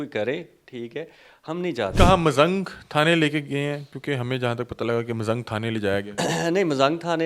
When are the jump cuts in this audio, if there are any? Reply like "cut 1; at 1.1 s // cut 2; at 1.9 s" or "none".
cut 1; at 1.9 s